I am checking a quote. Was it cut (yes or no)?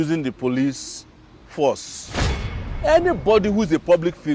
yes